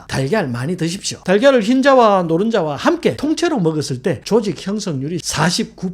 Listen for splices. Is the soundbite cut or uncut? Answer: cut